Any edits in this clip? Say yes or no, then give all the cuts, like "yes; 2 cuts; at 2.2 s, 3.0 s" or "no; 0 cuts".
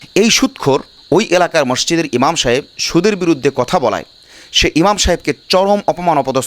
yes; 1 cut; at 0.9 s